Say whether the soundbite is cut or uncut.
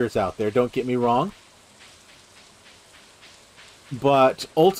uncut